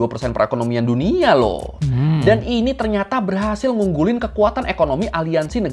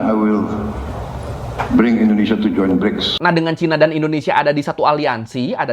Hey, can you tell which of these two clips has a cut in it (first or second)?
second